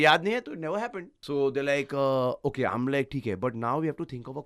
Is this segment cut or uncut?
cut